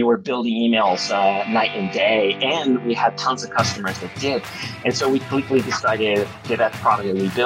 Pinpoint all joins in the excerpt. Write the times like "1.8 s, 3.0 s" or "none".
6.4 s